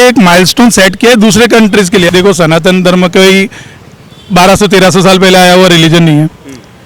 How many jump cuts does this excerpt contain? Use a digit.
1